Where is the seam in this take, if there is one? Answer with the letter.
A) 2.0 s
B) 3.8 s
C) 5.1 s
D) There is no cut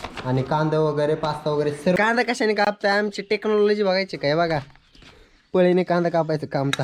A